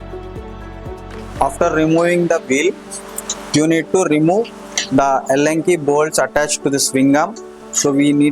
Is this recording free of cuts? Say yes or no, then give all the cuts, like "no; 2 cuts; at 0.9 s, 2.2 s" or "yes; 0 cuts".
no; 1 cut; at 1.2 s